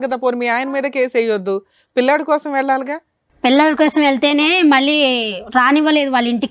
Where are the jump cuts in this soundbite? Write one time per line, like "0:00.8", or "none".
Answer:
none